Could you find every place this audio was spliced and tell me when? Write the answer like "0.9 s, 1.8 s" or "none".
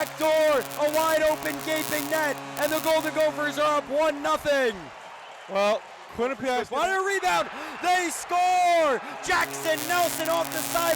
6.6 s